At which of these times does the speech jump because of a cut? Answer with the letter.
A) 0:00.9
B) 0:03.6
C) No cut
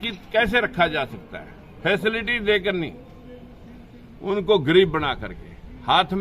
C